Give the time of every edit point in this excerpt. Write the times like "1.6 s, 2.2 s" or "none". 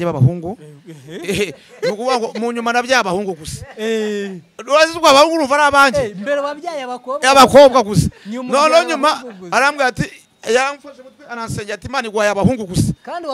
none